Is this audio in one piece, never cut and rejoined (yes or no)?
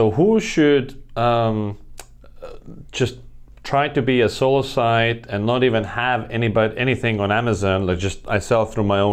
yes